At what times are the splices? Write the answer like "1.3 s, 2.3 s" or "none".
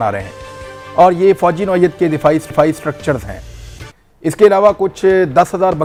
none

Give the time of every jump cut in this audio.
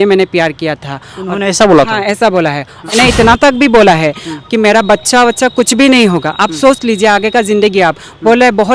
2.9 s

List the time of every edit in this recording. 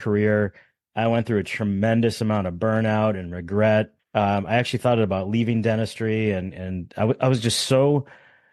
4.0 s

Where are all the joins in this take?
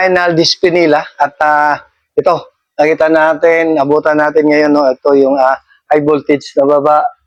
none

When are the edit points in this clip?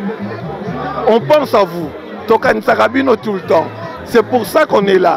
none

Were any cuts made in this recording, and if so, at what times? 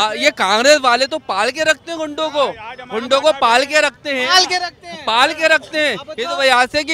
none

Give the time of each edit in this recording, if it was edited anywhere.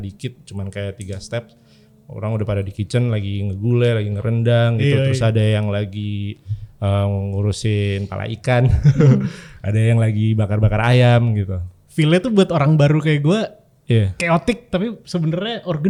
none

